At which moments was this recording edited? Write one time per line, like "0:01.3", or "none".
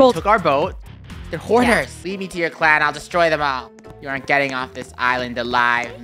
0:02.0